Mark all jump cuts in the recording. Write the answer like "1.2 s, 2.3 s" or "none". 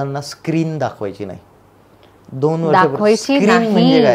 none